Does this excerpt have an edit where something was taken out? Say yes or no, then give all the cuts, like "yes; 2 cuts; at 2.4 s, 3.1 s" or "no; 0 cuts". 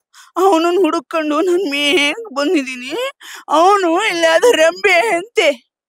no; 0 cuts